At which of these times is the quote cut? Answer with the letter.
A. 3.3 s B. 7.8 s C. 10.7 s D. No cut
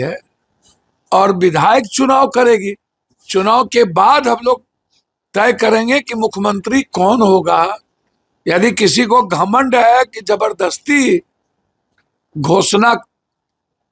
D